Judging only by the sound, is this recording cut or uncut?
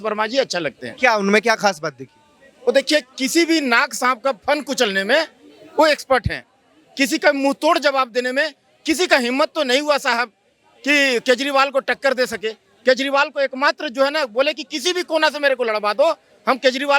uncut